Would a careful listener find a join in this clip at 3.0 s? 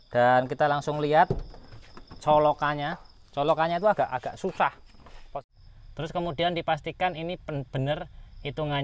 no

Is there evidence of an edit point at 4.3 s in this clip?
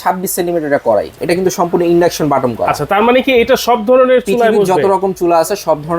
no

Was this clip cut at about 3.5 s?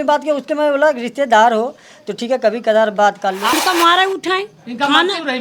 yes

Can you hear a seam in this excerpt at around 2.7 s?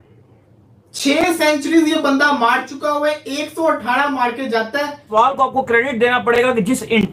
no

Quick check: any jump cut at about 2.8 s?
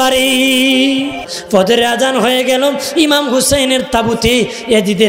no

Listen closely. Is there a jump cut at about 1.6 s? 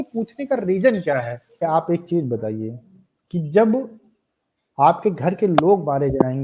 yes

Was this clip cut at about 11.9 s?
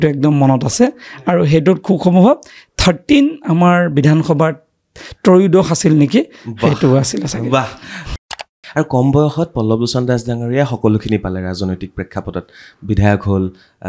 no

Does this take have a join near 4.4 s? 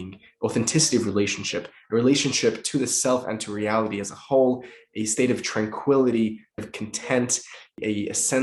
no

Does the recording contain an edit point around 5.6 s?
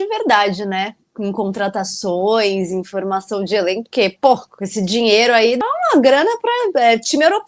yes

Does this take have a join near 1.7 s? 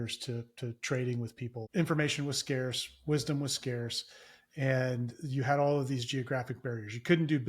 yes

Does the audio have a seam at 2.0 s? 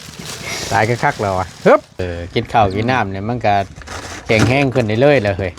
yes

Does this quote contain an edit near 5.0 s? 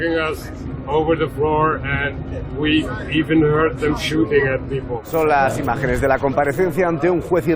yes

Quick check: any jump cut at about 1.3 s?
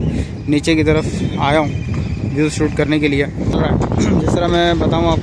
no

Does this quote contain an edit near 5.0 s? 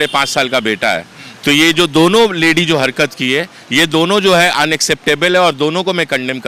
no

